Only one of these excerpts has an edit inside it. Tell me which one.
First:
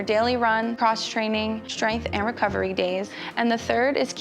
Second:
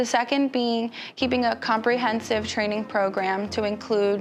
first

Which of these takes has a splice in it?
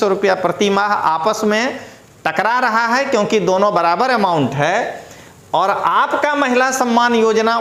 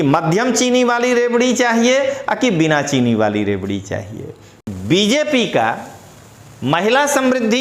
second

